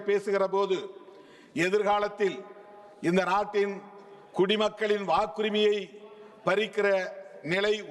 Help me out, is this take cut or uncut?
uncut